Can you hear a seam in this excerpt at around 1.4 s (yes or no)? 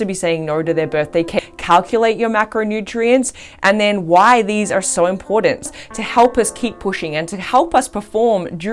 yes